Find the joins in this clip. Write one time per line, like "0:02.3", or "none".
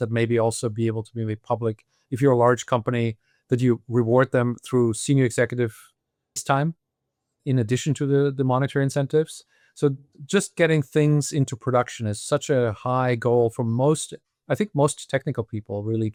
none